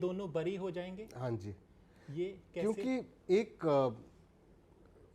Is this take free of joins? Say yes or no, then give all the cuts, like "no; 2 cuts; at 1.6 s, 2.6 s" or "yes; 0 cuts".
yes; 0 cuts